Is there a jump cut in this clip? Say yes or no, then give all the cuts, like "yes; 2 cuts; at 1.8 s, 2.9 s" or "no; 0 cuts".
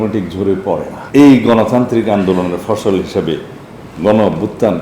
yes; 1 cut; at 1.0 s